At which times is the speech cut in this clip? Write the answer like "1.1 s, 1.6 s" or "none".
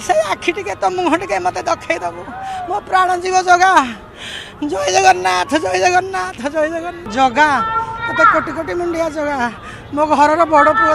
7.0 s